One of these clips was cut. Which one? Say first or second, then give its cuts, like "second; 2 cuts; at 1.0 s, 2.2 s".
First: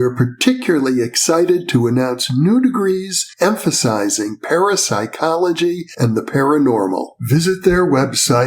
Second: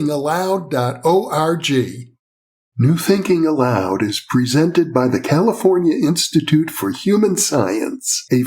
second; 1 cut; at 2.7 s